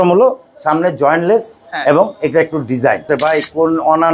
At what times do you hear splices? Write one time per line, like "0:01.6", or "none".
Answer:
0:03.0